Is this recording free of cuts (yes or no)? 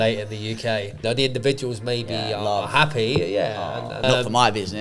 no